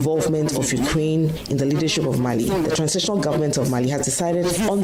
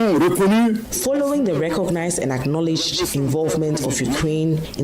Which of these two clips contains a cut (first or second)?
second